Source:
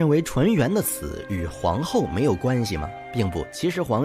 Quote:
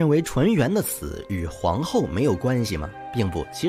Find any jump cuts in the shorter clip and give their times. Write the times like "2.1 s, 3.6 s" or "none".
none